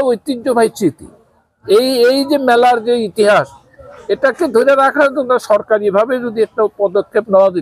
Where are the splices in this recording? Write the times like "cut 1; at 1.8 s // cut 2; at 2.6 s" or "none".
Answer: none